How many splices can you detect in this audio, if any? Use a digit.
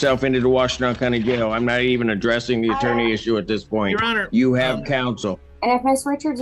1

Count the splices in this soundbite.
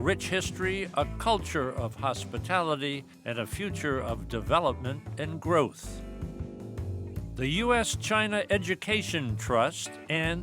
2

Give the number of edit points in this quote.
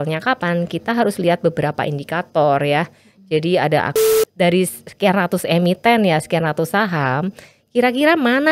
1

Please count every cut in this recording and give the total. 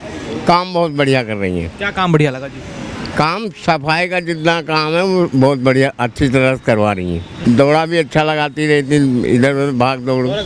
1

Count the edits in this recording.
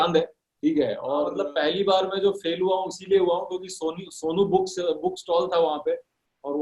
1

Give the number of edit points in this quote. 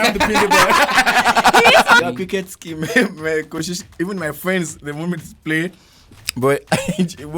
1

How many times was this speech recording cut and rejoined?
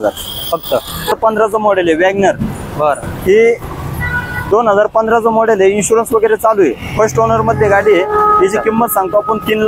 1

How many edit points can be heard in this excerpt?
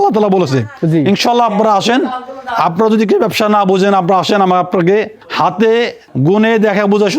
2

